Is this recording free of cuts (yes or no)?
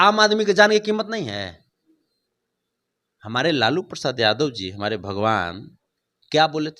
yes